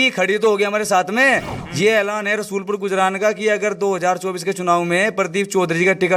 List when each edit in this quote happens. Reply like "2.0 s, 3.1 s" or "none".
1.6 s

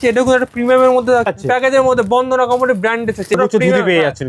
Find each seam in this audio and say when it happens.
1.3 s, 3.3 s

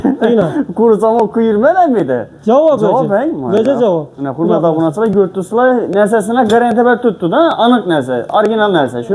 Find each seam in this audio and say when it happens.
none

